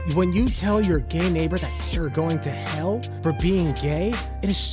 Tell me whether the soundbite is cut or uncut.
uncut